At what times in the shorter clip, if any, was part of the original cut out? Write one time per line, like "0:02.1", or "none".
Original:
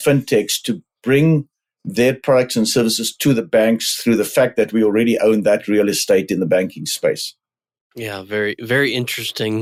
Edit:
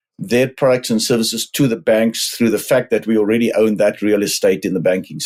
none